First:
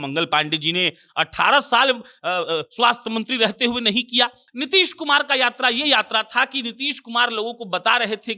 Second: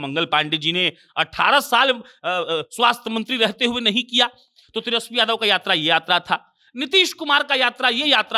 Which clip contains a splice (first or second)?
first